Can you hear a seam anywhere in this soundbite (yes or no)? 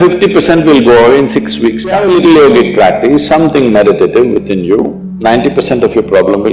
yes